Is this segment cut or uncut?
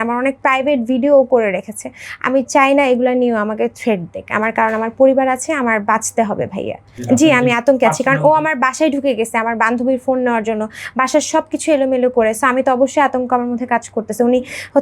uncut